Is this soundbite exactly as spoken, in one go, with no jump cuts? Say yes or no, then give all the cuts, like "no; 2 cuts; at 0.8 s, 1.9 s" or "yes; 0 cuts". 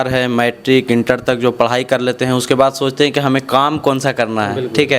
yes; 0 cuts